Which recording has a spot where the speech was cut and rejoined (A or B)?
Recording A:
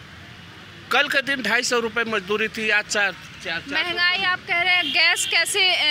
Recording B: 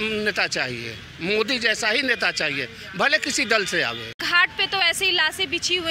B